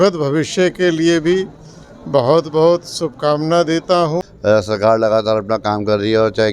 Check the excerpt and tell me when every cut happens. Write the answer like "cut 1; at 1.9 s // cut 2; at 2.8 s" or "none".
cut 1; at 4.3 s

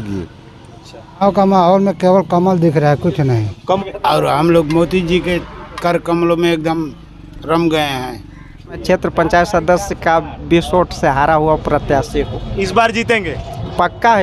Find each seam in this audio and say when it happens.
cut 1; at 1.2 s // cut 2; at 3.8 s // cut 3; at 8.8 s

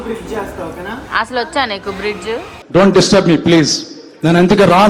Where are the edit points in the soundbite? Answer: none

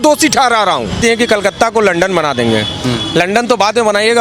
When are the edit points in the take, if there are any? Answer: cut 1; at 1.0 s

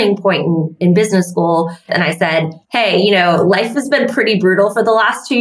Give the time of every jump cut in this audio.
cut 1; at 2.1 s

